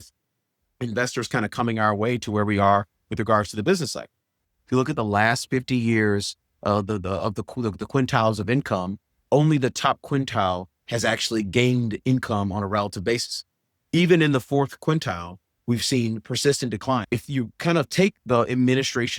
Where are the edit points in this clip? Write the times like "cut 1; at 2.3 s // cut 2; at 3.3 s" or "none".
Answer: cut 1; at 4.4 s // cut 2; at 17.0 s